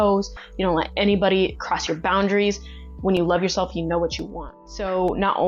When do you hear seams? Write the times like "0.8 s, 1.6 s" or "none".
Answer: 4.4 s